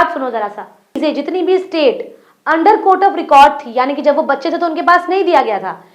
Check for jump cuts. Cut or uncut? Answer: cut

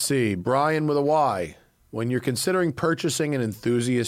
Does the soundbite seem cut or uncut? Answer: uncut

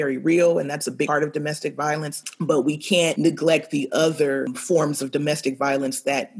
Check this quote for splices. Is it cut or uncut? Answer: cut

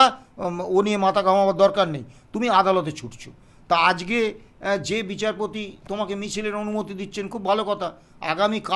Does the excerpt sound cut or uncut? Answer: uncut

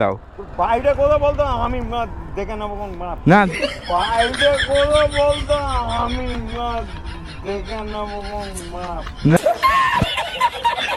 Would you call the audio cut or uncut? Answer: uncut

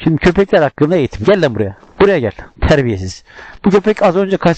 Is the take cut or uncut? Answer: uncut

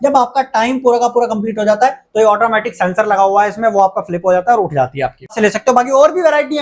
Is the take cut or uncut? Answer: cut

